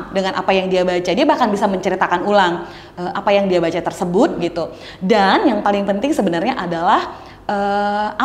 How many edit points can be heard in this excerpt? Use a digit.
0